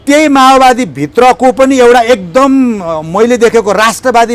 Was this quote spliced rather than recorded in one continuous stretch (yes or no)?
no